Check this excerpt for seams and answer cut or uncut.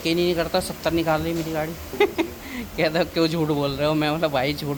uncut